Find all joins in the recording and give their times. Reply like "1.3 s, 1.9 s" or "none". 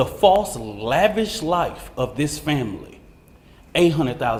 none